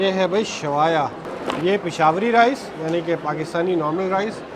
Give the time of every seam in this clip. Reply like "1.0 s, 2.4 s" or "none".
1.3 s